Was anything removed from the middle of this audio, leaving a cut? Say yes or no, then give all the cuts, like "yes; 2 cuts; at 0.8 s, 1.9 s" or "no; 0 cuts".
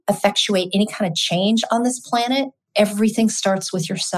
no; 0 cuts